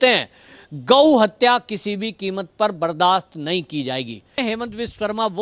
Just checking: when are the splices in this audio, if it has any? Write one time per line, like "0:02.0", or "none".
0:04.4